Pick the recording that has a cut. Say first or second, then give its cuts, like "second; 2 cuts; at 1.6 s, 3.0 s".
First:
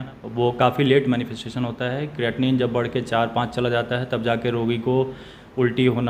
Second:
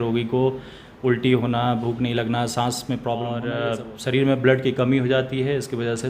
second; 1 cut; at 3.5 s